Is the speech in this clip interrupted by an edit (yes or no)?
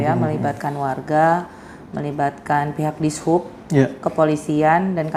no